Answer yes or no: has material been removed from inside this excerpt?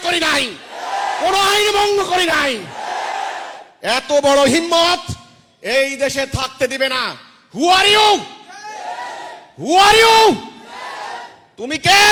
no